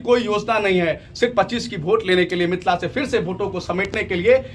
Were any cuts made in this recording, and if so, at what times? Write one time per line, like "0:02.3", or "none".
none